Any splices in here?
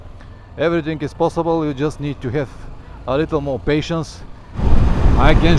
yes; 1 cut; at 4.6 s

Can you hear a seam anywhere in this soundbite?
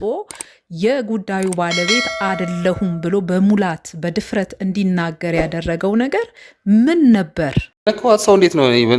yes; 1 cut; at 7.8 s

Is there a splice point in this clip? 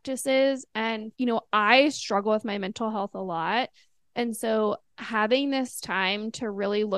yes; 1 cut; at 1.1 s

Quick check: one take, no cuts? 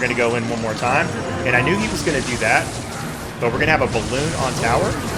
yes; 0 cuts

